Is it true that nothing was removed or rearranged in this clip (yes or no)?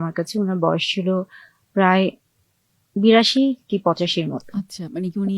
yes